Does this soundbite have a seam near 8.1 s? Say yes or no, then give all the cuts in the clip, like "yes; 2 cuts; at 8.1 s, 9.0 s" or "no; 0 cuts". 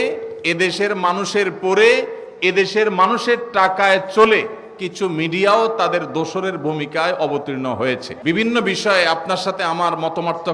yes; 1 cut; at 8.1 s